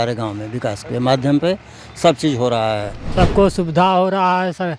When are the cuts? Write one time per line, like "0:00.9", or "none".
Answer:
0:03.0